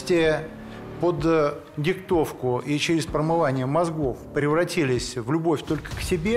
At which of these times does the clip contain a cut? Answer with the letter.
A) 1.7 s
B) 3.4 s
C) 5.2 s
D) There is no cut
D